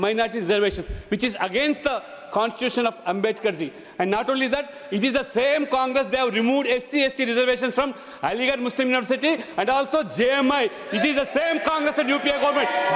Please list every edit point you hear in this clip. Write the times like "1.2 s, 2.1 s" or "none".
none